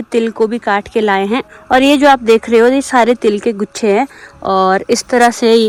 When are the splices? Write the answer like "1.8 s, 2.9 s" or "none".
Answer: none